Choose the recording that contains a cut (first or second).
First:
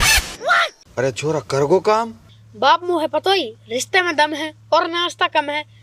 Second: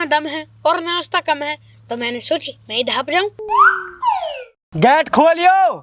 second